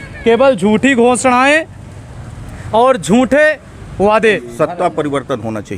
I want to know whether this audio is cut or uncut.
cut